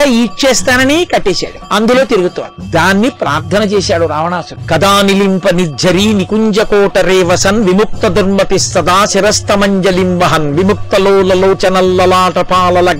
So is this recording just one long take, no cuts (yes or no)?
no